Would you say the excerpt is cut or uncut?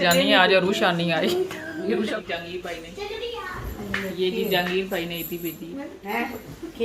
cut